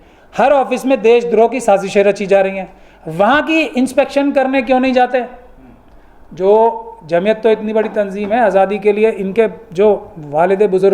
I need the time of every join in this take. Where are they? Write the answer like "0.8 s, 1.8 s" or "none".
none

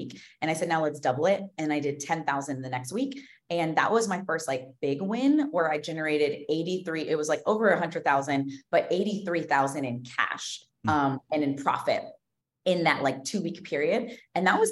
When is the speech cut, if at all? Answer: none

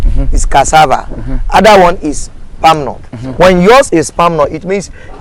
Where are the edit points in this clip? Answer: none

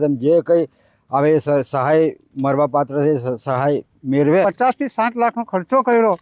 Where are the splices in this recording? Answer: 4.4 s

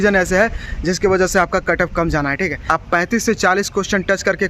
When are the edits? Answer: 2.6 s

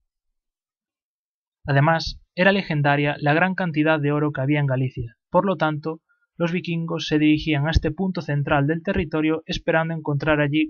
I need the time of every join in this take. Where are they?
5.0 s

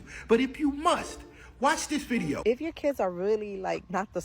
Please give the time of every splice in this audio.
2.4 s

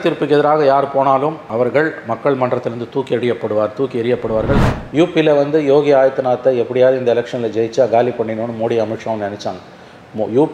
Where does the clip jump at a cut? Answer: 4.6 s

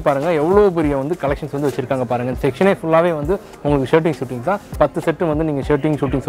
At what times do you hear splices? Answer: 4.7 s

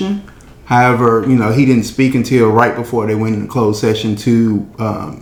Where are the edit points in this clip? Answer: none

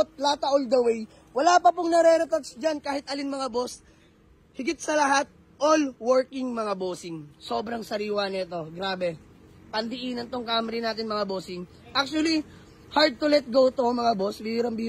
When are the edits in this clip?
none

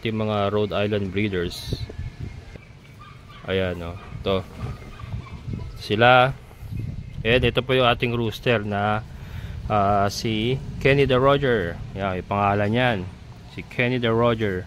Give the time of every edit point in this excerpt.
2.5 s

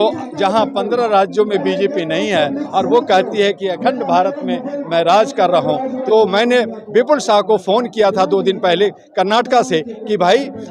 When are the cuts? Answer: 6.0 s

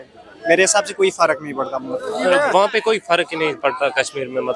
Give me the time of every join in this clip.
2.2 s

